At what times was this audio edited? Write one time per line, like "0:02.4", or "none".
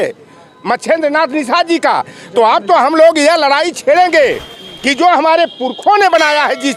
none